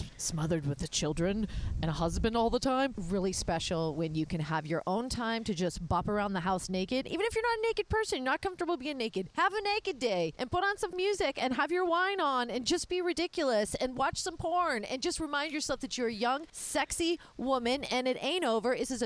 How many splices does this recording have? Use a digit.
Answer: 2